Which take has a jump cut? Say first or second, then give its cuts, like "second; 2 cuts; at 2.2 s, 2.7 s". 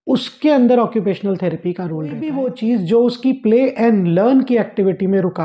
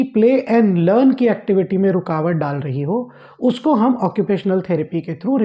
first; 1 cut; at 2.3 s